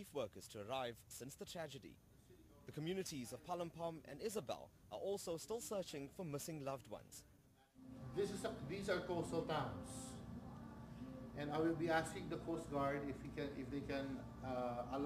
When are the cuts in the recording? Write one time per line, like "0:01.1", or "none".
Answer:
0:01.3